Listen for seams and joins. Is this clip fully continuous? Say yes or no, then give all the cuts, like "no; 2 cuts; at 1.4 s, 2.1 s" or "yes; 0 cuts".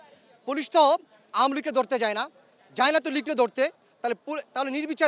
yes; 0 cuts